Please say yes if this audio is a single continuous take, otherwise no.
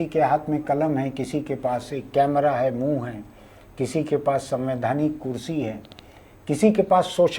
yes